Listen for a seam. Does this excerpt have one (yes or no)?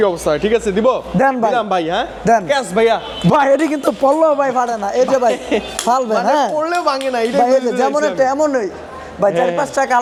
no